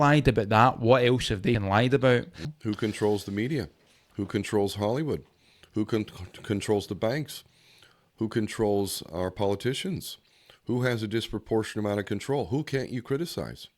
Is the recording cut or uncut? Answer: cut